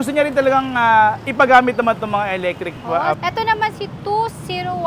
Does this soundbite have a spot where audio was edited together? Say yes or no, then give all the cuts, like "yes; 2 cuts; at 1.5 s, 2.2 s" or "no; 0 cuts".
yes; 1 cut; at 3.2 s